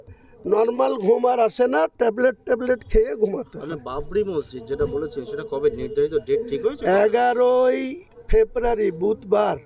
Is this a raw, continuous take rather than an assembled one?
yes; 0 cuts

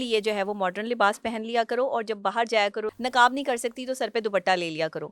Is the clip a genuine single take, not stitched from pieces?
no; 1 cut; at 2.9 s

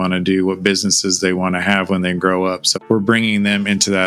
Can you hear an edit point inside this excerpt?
no; 0 cuts

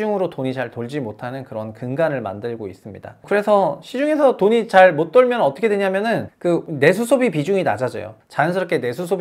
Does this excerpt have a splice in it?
yes; 1 cut; at 8.2 s

